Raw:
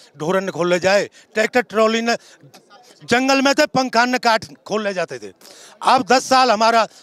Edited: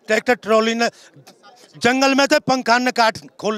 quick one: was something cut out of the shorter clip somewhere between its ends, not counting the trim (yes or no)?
no